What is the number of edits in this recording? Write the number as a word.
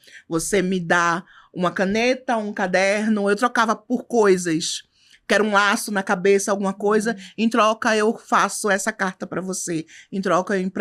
zero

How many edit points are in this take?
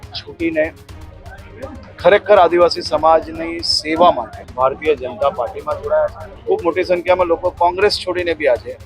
two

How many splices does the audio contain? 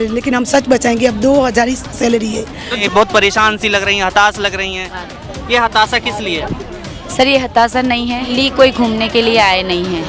two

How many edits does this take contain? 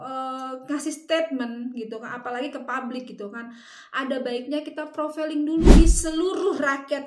one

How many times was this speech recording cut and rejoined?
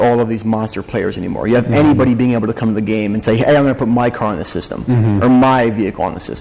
zero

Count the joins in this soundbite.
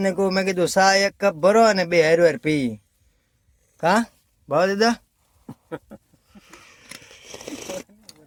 zero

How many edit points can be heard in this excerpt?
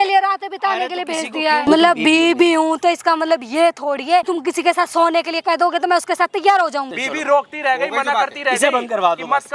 three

